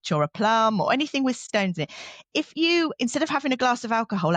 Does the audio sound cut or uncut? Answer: cut